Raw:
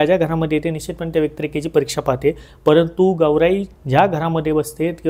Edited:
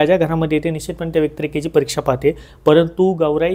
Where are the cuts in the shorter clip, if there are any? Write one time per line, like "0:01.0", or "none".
none